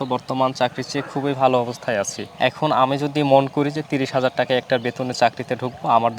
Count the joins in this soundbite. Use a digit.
1